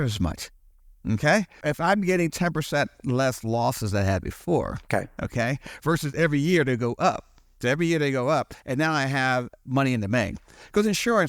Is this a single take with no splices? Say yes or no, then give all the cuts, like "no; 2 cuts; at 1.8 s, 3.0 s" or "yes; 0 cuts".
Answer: no; 1 cut; at 1.5 s